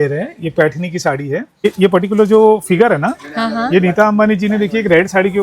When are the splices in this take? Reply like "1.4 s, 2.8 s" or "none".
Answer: 1.6 s